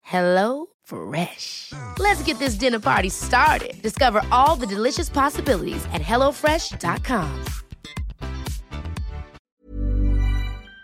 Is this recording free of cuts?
no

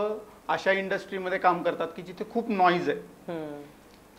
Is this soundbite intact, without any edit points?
yes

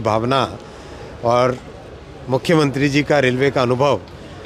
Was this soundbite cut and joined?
no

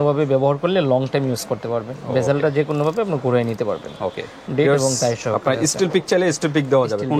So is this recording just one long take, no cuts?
yes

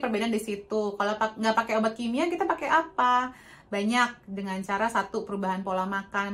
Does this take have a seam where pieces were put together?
no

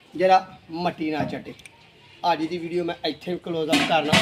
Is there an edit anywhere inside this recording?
no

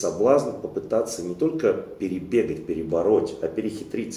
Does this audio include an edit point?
no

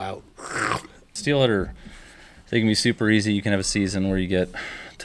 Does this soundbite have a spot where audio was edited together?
yes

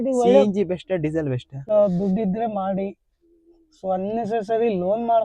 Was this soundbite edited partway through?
yes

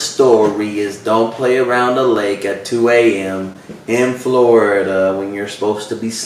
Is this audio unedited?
yes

